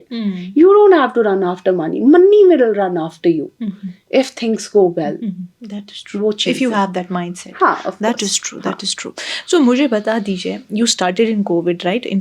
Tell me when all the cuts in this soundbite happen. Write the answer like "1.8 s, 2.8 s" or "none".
none